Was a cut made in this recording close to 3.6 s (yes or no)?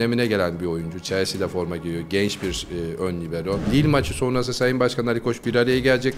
yes